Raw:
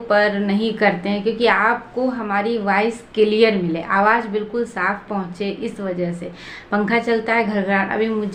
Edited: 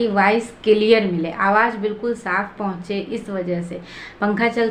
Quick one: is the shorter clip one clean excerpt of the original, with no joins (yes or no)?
yes